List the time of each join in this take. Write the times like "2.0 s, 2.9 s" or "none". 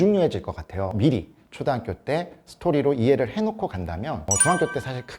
0.9 s